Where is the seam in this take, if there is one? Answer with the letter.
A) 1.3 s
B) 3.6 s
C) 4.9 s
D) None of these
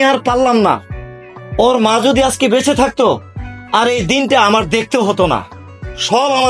D